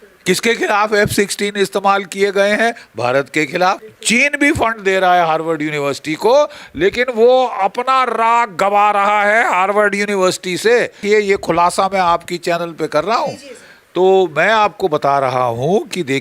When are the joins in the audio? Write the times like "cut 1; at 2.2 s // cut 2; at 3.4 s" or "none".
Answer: cut 1; at 3.9 s // cut 2; at 11.0 s